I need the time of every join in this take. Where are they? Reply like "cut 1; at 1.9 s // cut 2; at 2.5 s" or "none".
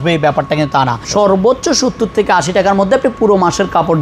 cut 1; at 1.0 s